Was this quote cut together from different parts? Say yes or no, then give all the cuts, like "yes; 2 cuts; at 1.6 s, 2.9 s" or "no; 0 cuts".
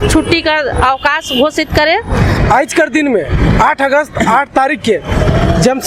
yes; 1 cut; at 2.3 s